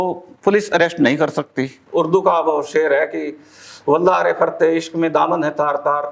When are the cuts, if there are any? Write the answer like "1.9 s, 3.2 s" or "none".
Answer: 1.8 s